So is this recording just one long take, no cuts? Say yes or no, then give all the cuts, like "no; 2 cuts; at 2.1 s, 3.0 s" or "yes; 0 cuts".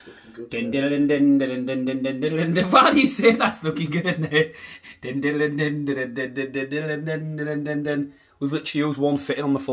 yes; 0 cuts